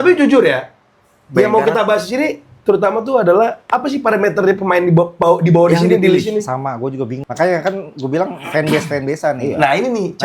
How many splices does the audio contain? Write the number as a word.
one